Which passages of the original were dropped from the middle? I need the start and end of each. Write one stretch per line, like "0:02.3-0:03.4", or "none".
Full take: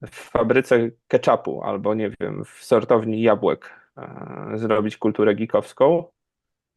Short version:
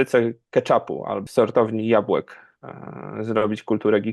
0:01.7-0:02.5